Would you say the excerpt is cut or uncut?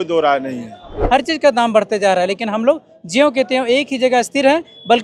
cut